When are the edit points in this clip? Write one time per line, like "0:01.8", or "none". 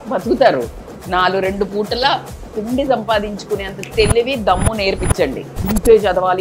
none

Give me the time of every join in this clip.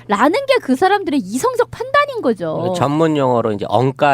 0:03.0

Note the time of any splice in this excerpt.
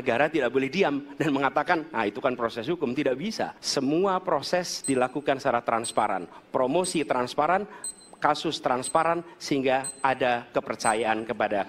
0:03.6

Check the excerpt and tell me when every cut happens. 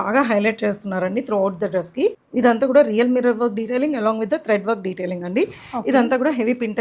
0:02.2

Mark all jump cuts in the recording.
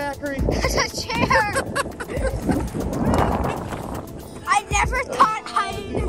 none

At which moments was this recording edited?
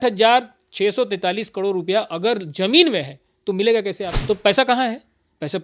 0:04.1

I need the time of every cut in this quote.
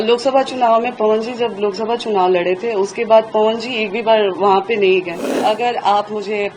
0:05.3

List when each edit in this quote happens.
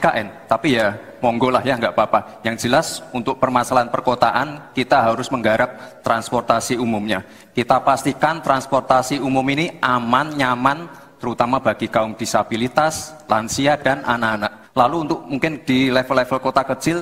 0:14.6

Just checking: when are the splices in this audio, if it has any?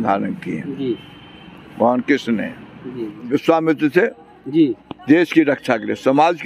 0:03.3

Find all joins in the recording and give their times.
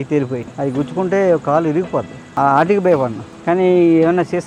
none

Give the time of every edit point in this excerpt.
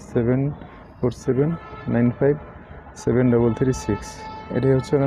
none

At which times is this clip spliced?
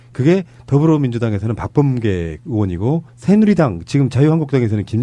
0:03.1

